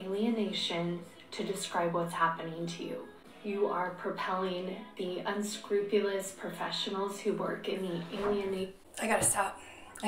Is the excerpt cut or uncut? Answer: uncut